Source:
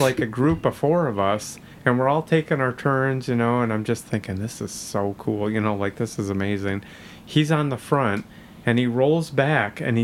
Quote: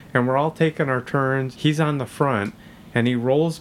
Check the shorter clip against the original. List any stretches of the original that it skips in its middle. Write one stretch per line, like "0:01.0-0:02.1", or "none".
0:03.2-0:07.2